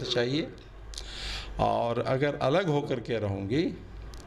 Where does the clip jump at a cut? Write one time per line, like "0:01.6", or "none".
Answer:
none